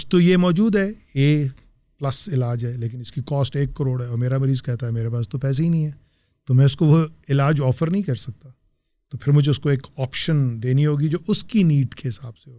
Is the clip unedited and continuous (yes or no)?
yes